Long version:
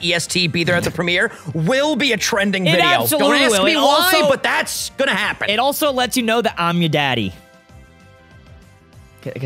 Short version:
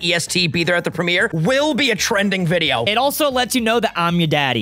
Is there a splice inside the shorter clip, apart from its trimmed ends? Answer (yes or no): yes